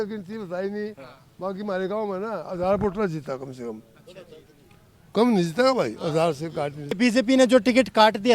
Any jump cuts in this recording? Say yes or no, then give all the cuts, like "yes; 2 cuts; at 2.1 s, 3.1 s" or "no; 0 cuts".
yes; 1 cut; at 7.0 s